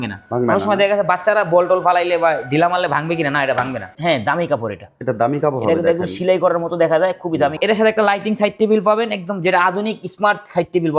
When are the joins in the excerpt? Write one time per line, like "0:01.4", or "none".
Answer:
0:03.9
0:07.6